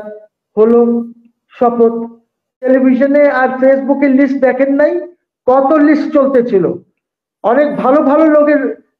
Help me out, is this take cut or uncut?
cut